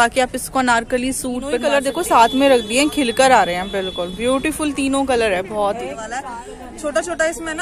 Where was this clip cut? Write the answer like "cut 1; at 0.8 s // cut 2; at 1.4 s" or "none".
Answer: cut 1; at 1.7 s // cut 2; at 6.2 s